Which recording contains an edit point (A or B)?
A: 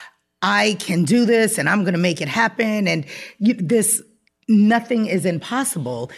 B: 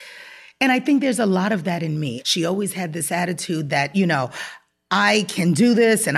B